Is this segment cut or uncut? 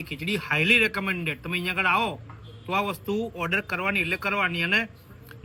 uncut